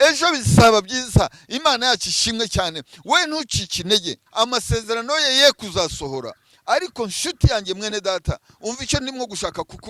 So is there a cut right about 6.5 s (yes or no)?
no